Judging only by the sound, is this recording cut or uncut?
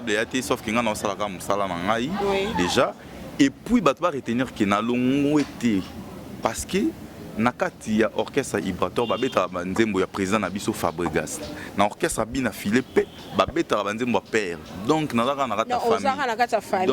uncut